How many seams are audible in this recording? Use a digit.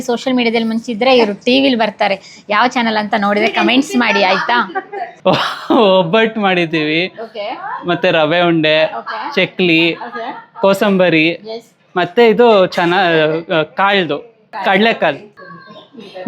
2